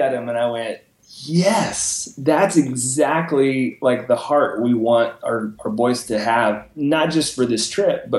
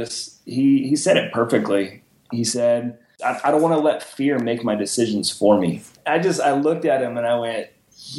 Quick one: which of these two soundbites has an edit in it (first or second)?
second